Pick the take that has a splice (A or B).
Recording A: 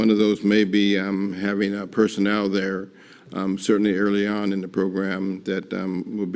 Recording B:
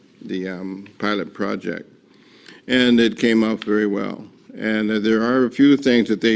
B